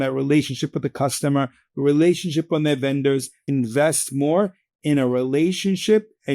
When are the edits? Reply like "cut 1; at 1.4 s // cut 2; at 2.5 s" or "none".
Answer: cut 1; at 3.4 s